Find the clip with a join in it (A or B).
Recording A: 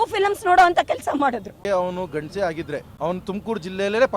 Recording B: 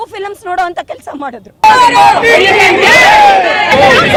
A